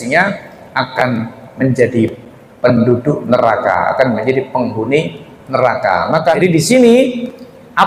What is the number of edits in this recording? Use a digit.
1